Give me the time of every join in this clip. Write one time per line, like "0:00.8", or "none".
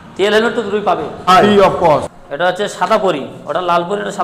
0:02.2

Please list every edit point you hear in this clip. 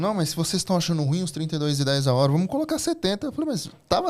none

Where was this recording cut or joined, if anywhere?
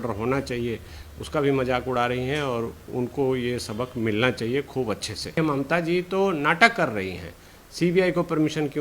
0:05.4

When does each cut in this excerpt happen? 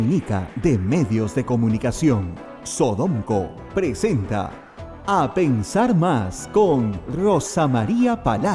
none

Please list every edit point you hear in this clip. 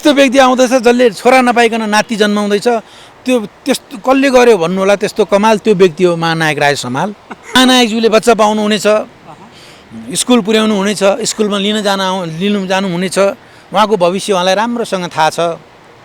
0:07.6

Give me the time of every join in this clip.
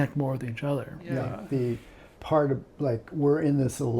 0:01.4

